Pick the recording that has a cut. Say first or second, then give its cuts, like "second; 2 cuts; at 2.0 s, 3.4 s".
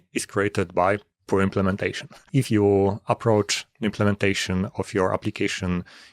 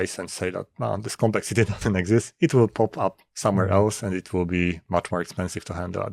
first; 1 cut; at 2.4 s